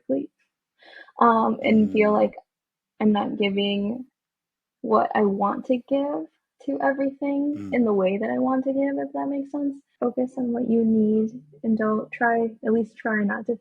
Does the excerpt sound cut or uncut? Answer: cut